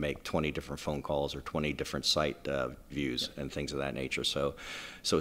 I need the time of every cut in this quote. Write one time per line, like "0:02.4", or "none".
none